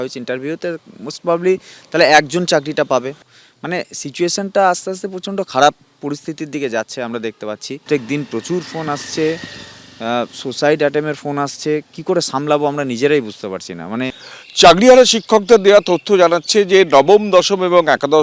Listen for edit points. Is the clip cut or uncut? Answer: cut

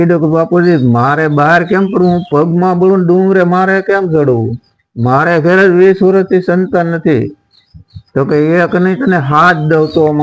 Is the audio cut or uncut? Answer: uncut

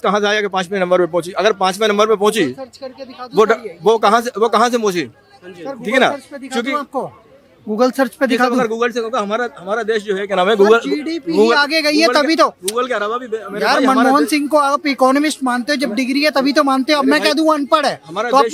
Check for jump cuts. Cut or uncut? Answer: uncut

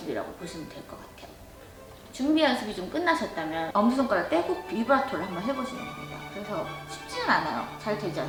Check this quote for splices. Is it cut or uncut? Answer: uncut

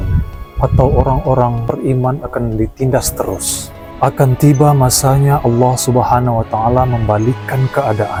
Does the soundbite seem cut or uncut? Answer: uncut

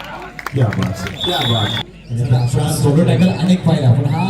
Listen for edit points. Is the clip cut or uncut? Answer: cut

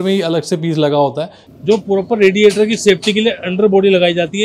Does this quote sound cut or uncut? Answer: cut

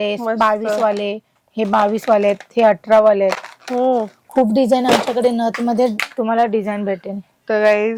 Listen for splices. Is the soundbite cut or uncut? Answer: uncut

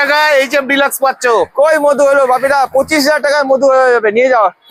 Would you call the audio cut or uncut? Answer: uncut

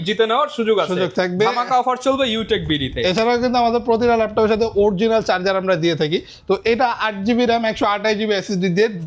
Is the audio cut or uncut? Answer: uncut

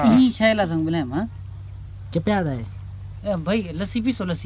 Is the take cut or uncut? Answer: uncut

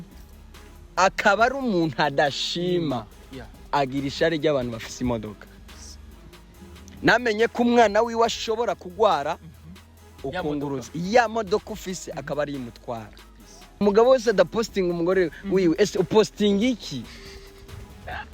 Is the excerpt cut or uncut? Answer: cut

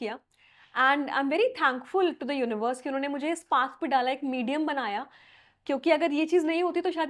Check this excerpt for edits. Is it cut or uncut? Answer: uncut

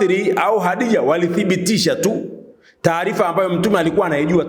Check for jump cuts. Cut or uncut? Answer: uncut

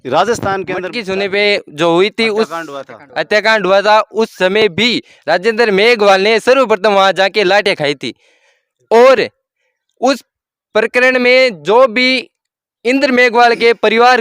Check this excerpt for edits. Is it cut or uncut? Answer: cut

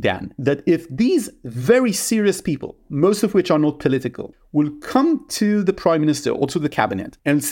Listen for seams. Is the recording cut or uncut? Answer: cut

